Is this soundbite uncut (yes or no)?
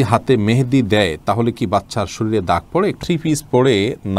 no